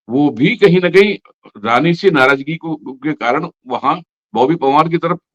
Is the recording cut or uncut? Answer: uncut